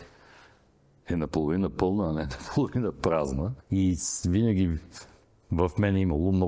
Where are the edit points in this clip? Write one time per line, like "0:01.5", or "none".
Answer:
0:03.6

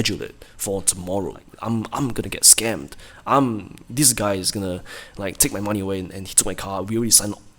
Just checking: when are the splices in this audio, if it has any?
0:01.5

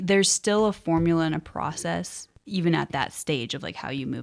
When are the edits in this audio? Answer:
none

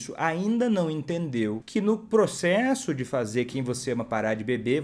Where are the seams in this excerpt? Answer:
0:01.6

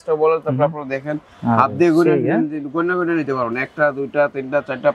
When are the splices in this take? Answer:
none

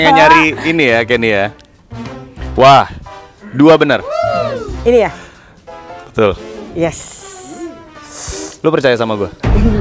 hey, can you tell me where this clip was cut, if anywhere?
0:04.6

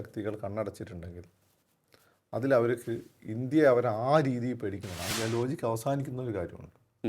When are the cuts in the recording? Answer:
0:05.0

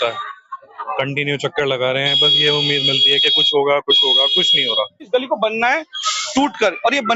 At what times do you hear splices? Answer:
0:05.1

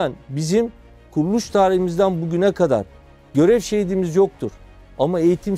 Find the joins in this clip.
none

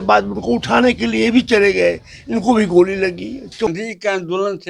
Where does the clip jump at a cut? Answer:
0:03.7

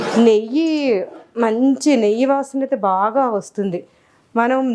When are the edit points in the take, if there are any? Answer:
none

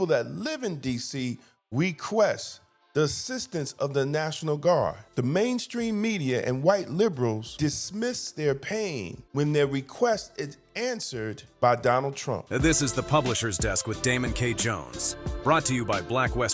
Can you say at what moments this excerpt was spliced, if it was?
0:12.3

